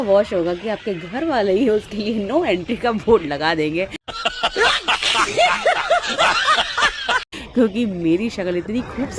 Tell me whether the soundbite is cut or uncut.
uncut